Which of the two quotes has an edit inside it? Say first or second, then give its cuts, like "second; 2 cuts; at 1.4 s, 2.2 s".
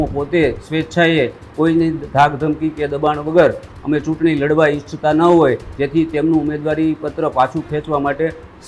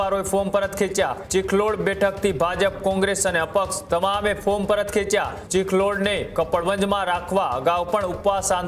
second; 2 cuts; at 1.2 s, 5.4 s